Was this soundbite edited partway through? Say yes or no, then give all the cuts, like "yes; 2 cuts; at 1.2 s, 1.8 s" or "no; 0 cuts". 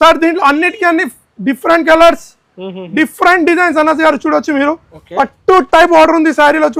no; 0 cuts